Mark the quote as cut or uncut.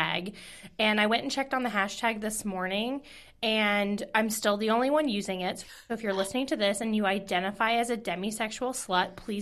uncut